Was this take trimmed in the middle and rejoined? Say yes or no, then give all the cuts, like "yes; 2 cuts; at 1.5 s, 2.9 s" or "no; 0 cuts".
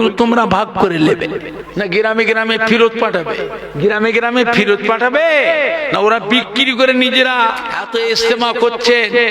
yes; 3 cuts; at 1.6 s, 3.6 s, 7.7 s